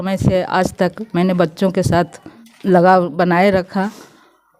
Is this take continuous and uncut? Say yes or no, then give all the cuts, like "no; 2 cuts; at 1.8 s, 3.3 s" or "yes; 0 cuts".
yes; 0 cuts